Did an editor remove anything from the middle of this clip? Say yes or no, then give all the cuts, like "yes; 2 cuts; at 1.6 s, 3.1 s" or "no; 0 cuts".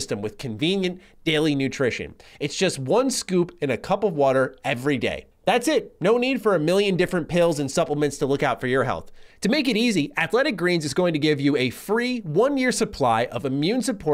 no; 0 cuts